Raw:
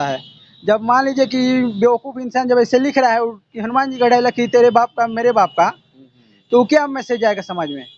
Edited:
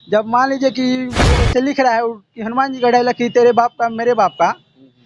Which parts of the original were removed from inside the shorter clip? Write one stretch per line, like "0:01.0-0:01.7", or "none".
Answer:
0:01.7-0:02.3